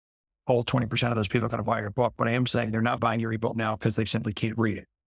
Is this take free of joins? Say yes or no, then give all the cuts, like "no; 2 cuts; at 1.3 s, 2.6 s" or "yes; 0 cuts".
yes; 0 cuts